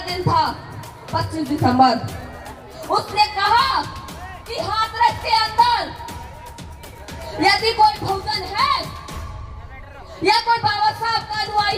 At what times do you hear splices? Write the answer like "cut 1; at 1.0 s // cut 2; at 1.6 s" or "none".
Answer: none